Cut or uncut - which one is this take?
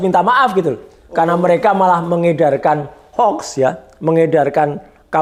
uncut